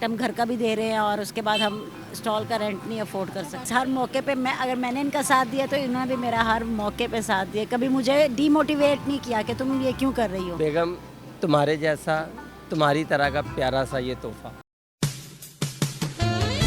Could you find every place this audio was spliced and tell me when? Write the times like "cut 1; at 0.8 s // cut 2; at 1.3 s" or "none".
cut 1; at 3.6 s // cut 2; at 10.5 s